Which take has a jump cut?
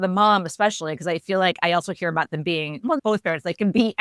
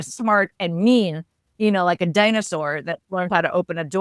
first; 1 cut; at 3.0 s

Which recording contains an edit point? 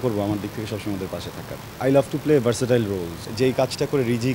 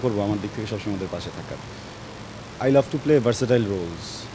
first; 2 cuts; at 1.6 s, 3.3 s

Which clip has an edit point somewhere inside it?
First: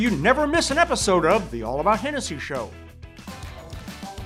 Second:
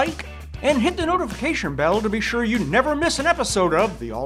first; 1 cut; at 2.9 s

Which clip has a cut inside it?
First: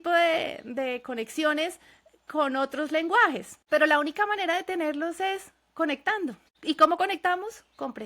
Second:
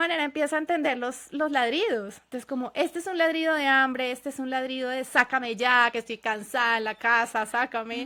first; 2 cuts; at 3.5 s, 6.5 s

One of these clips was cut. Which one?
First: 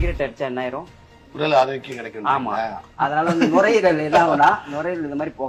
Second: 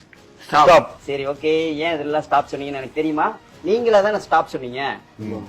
second; 2 cuts; at 1.0 s, 3.5 s

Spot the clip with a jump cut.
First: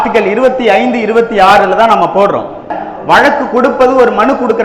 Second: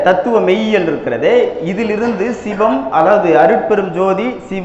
first; 1 cut; at 2.8 s

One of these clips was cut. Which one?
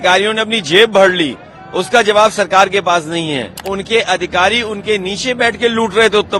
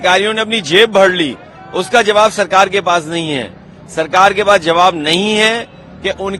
first; 1 cut; at 3.7 s

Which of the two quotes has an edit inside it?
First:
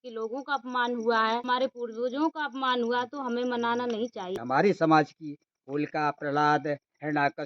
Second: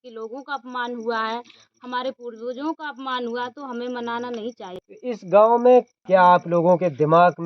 first; 2 cuts; at 1.4 s, 4.4 s

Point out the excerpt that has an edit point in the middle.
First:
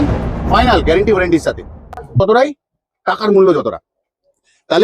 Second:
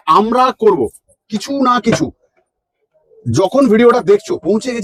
first; 1 cut; at 2.2 s

